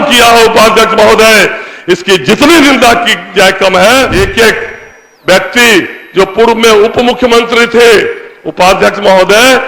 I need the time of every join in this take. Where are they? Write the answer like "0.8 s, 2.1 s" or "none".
4.1 s